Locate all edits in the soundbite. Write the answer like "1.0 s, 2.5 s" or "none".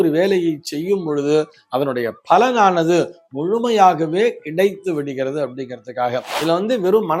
6.3 s